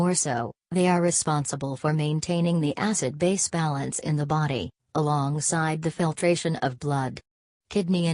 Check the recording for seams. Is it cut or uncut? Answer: cut